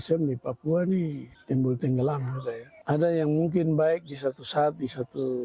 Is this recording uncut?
no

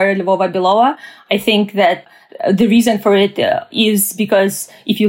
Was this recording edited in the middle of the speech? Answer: yes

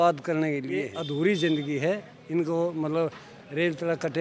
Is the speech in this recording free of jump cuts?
no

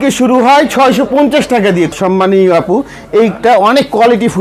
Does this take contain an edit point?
yes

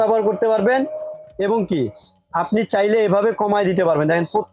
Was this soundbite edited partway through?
no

